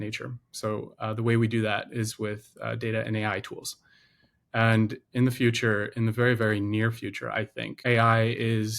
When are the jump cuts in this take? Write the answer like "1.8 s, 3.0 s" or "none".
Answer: 7.6 s